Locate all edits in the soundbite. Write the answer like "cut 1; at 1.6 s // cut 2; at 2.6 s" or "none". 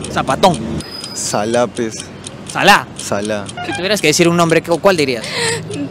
cut 1; at 0.8 s // cut 2; at 3.6 s